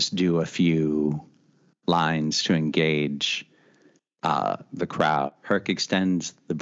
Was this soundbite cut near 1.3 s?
no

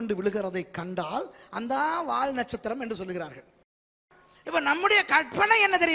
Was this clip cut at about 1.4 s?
no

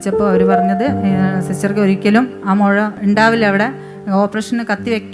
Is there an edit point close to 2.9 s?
yes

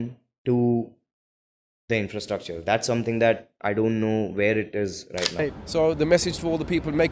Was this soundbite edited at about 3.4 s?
no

